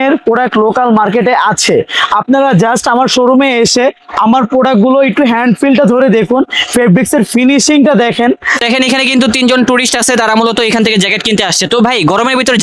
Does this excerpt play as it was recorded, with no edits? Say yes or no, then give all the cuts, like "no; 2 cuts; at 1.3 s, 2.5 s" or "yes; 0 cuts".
no; 1 cut; at 8.6 s